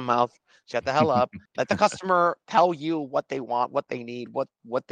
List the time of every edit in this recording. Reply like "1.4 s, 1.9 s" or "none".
1.4 s